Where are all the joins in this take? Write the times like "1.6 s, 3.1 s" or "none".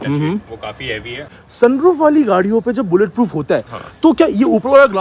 1.3 s